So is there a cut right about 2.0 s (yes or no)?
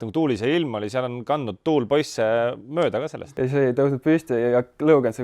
no